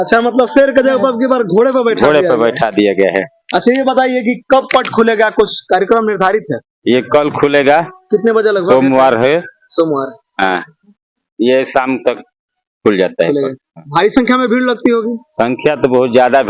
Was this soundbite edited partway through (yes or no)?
no